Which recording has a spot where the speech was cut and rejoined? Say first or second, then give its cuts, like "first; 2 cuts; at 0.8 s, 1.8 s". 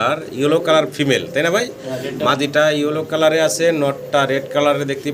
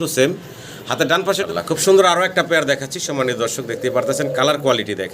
second; 1 cut; at 1.5 s